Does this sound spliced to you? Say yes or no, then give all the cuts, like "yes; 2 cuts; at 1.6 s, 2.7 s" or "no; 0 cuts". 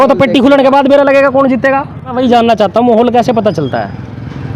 yes; 1 cut; at 2.2 s